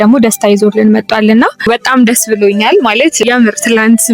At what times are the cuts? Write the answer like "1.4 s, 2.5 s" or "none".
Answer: 1.7 s, 3.2 s